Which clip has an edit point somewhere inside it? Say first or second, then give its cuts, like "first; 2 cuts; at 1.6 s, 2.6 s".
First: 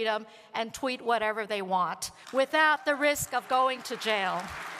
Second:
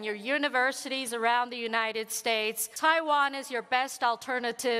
second; 1 cut; at 2.6 s